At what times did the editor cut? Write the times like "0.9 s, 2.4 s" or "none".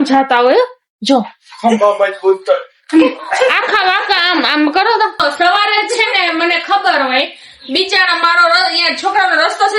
5.2 s